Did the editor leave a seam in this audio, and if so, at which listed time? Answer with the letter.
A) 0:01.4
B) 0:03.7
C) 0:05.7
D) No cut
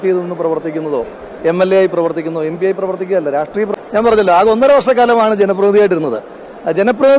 B